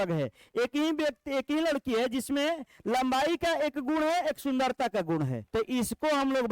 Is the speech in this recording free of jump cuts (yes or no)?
no